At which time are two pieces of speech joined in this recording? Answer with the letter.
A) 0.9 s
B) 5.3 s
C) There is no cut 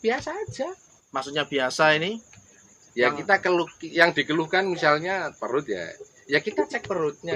C